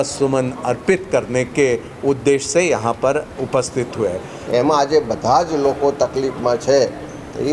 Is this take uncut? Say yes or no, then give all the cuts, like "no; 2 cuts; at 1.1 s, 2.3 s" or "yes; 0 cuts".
no; 1 cut; at 4.3 s